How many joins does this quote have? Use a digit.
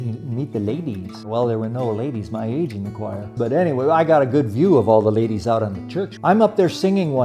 3